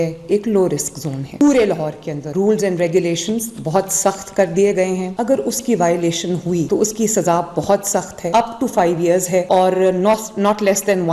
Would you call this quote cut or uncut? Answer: cut